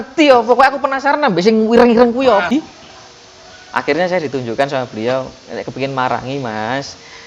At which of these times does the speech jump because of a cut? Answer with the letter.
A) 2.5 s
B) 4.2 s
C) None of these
A